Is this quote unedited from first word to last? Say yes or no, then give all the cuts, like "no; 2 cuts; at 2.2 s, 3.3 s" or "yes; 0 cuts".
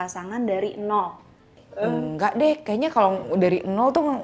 no; 1 cut; at 1.6 s